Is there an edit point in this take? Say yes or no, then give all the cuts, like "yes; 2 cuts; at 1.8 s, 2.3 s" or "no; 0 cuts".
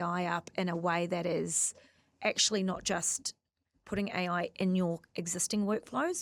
no; 0 cuts